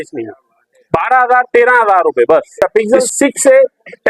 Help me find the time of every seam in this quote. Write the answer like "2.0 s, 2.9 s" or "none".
2.6 s